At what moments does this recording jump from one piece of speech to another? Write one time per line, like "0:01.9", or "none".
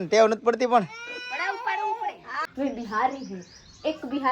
0:02.3